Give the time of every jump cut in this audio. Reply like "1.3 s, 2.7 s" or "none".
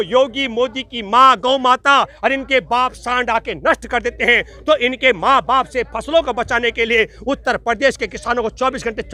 none

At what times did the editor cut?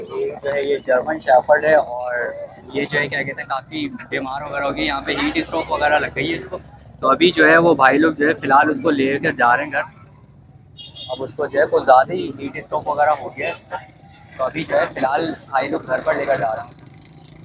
none

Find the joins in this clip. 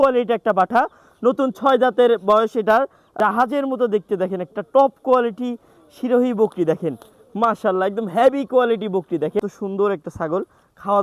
3.1 s, 9.4 s

